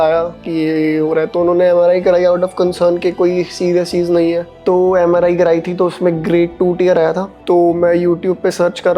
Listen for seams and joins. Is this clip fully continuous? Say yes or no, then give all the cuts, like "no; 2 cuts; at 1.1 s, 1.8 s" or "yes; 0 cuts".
no; 1 cut; at 4.5 s